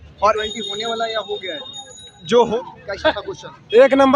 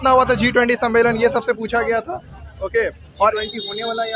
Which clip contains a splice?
first; 1 cut; at 2.6 s

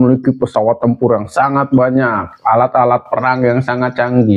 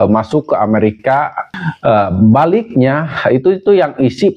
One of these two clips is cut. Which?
second; 1 cut; at 1.5 s

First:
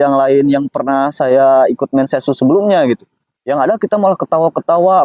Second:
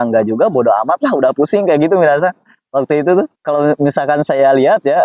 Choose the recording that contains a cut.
second; 1 cut; at 3.4 s

